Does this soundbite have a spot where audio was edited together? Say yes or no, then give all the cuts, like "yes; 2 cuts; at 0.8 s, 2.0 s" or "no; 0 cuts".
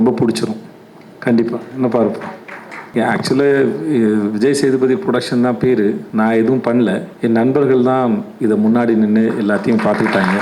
yes; 3 cuts; at 2.9 s, 6.0 s, 7.1 s